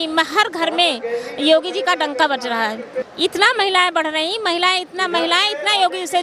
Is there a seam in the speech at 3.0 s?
yes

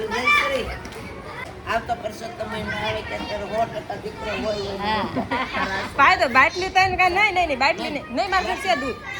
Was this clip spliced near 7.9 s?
no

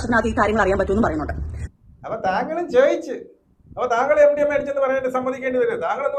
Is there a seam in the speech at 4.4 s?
no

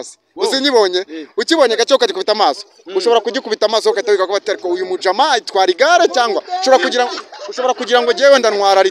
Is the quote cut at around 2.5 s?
no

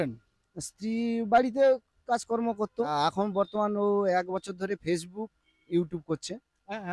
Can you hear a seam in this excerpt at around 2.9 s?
yes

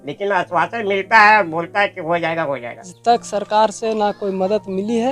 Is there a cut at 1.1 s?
no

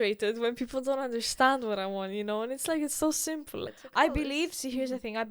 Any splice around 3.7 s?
yes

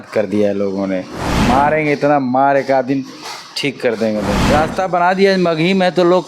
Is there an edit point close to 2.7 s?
no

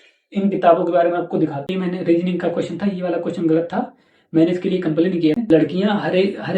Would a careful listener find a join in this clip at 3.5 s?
no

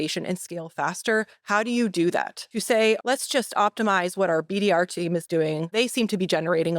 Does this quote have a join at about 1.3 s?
no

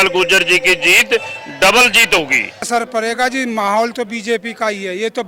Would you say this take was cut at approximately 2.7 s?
yes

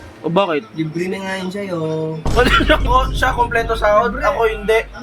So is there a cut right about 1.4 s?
no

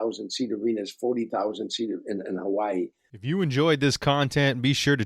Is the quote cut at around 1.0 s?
no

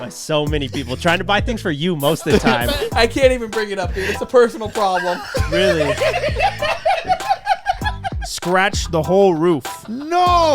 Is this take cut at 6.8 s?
no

